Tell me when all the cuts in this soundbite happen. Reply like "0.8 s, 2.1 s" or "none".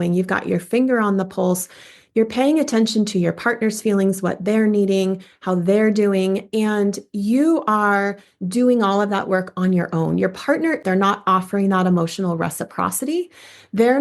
10.7 s